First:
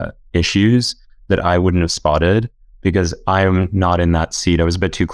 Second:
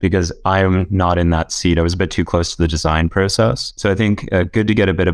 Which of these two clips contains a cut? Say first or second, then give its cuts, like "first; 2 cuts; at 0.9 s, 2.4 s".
second; 1 cut; at 3.7 s